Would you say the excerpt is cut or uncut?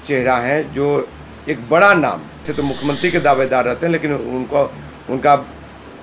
cut